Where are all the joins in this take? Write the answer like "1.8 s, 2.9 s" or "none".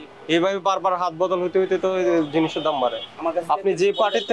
none